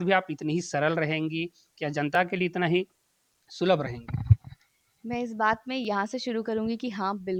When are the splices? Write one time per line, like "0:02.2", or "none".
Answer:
none